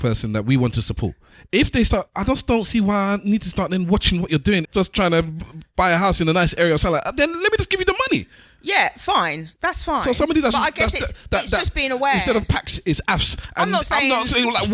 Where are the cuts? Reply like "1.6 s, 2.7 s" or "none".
4.7 s